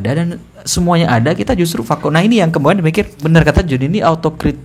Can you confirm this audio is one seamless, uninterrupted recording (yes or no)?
no